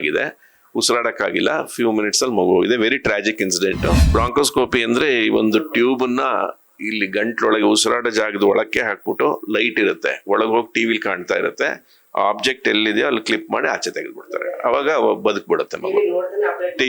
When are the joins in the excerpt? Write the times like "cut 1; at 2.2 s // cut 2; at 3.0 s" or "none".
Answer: cut 1; at 4.0 s